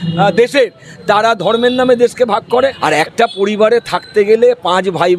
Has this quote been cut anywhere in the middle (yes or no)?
yes